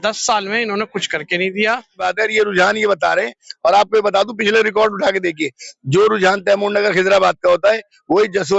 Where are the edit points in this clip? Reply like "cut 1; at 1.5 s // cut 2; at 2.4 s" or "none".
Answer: cut 1; at 2.0 s